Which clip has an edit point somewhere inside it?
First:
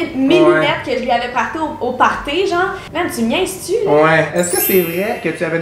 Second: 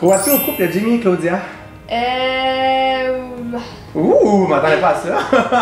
first; 2 cuts; at 2.8 s, 4.3 s

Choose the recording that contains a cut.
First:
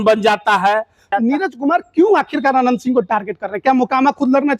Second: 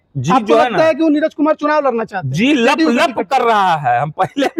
first; 1 cut; at 1.1 s

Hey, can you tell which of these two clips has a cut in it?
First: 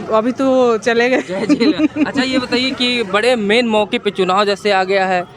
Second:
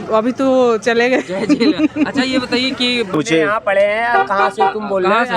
second; 1 cut; at 3.1 s

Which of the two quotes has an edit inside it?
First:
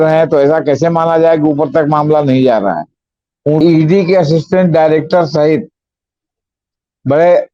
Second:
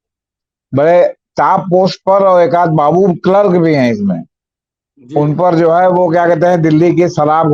first; 1 cut; at 3.6 s

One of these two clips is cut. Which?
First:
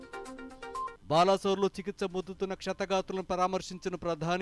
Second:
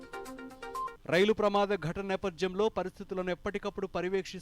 second; 1 cut; at 1.0 s

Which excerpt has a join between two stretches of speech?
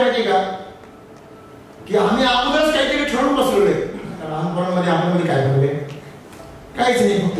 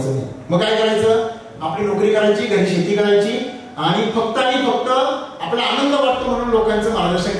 first; 1 cut; at 4.4 s

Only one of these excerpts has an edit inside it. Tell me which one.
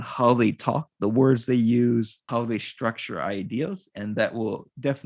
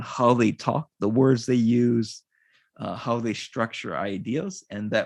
first; 1 cut; at 2.2 s

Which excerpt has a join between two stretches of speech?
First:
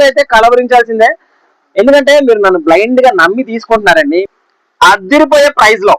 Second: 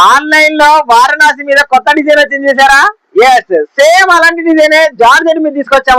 first; 1 cut; at 4.2 s

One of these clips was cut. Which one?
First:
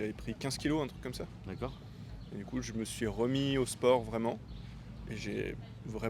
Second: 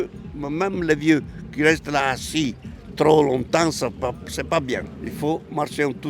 second; 1 cut; at 5.0 s

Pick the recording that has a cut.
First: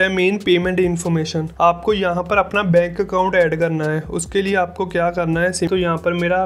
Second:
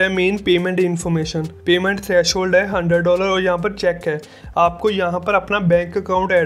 first; 2 cuts; at 1.4 s, 5.7 s

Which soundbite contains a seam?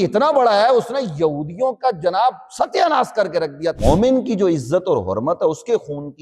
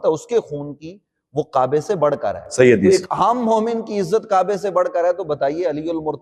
first; 1 cut; at 3.8 s

